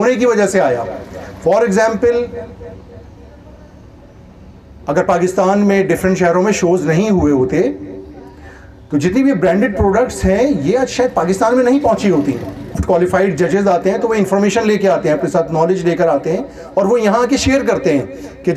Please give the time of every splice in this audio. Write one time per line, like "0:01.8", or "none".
0:12.8